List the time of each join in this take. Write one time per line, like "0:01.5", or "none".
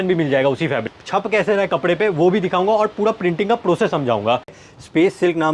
0:00.9
0:04.6